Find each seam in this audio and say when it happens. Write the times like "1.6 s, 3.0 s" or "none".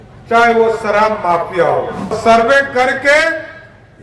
2.2 s